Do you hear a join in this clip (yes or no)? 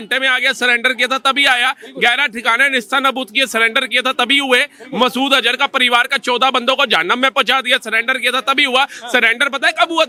no